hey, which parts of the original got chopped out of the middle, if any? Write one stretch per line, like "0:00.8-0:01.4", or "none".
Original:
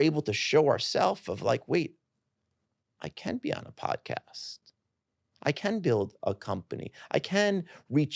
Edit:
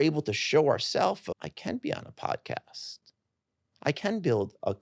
0:01.3-0:02.9